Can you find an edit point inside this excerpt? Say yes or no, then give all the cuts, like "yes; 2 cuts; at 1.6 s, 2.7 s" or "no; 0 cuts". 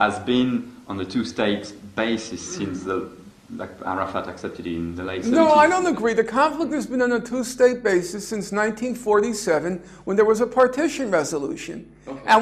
no; 0 cuts